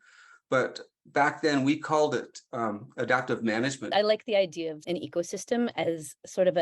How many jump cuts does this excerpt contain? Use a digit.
2